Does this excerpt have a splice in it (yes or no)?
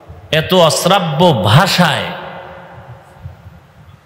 no